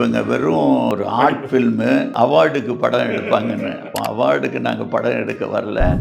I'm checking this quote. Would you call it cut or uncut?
cut